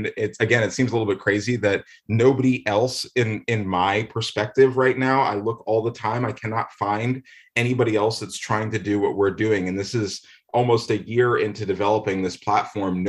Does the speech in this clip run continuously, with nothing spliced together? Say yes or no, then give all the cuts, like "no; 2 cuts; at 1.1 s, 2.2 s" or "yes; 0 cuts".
yes; 0 cuts